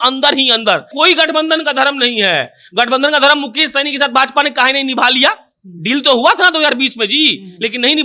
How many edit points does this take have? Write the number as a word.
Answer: one